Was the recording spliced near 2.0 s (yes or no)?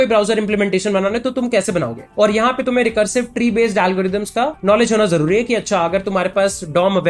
no